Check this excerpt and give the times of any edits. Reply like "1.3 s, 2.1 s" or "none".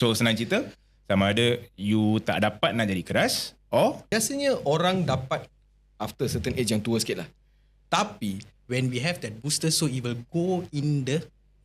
4.1 s, 8.5 s